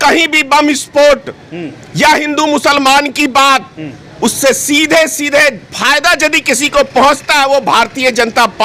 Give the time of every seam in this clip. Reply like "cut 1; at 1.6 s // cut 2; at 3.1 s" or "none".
none